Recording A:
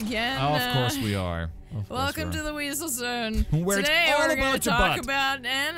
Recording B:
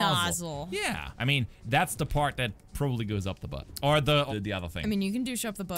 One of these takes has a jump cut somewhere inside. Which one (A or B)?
B